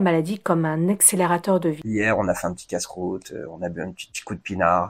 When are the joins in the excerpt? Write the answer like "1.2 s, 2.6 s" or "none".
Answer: 1.8 s